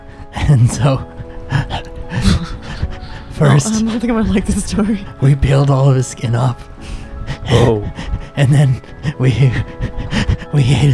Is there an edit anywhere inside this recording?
no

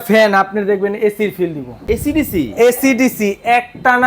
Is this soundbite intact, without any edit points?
no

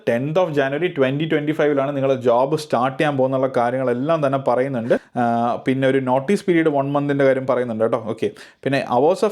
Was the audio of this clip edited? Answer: no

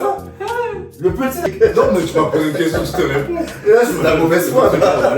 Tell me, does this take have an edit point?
yes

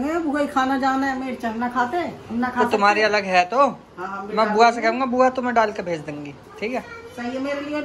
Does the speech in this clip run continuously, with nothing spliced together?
yes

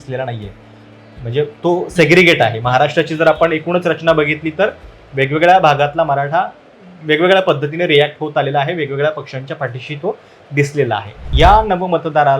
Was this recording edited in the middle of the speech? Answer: yes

